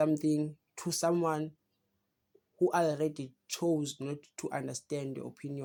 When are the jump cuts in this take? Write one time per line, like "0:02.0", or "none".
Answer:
none